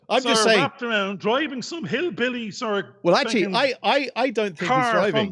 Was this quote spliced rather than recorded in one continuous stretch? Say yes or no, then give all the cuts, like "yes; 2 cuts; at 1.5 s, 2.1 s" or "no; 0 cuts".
no; 0 cuts